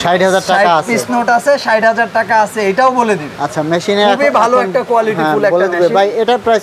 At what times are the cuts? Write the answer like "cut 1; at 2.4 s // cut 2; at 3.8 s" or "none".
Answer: none